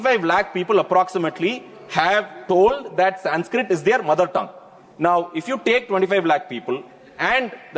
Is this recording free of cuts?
yes; 0 cuts

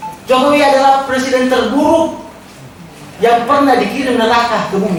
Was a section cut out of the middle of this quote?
no; 0 cuts

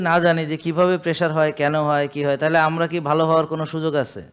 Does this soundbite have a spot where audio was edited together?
no; 0 cuts

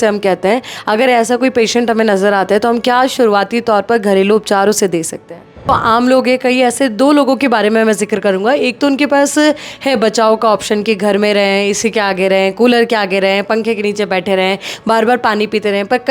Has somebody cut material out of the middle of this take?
yes; 1 cut; at 5.7 s

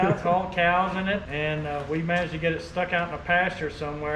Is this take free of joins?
no; 1 cut; at 1.3 s

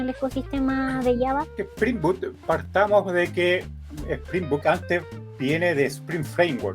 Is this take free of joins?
no; 2 cuts; at 1.6 s, 3.9 s

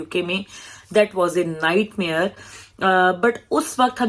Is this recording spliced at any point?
no; 0 cuts

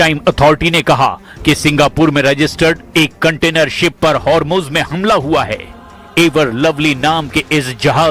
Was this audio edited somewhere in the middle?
yes; 1 cut; at 2.1 s

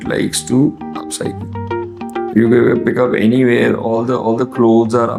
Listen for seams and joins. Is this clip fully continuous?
yes; 0 cuts

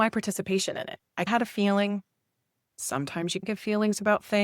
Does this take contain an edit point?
yes; 1 cut; at 3.5 s

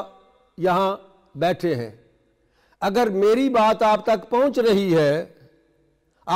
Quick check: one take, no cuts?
yes; 0 cuts

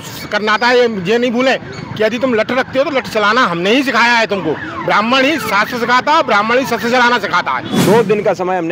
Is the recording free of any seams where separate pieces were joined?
no; 1 cut; at 7.7 s

